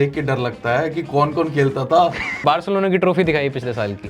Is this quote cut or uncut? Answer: cut